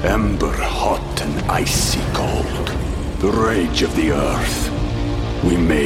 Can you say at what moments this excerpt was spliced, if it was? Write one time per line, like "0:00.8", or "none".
none